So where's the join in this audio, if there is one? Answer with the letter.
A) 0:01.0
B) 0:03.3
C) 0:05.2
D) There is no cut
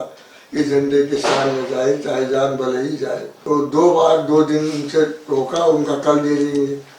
B